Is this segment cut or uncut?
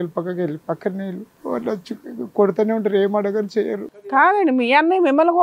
cut